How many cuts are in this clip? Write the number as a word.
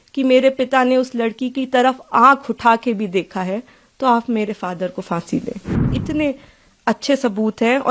one